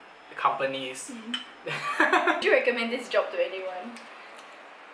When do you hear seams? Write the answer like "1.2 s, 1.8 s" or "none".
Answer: 2.4 s